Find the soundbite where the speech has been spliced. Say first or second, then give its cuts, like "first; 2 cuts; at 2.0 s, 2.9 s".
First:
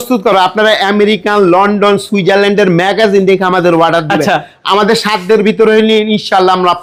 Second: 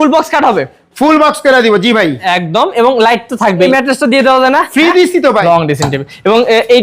second; 2 cuts; at 3.7 s, 5.4 s